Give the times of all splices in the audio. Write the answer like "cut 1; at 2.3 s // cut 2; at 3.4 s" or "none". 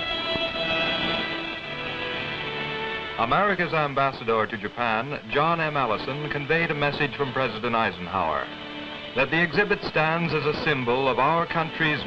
cut 1; at 6.3 s